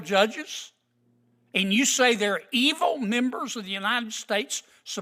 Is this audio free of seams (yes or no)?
yes